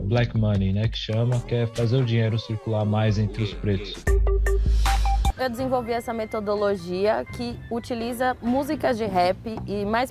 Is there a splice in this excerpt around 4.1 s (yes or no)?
yes